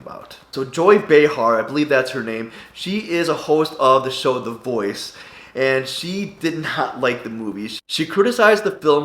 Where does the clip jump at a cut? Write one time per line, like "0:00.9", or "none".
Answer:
0:07.7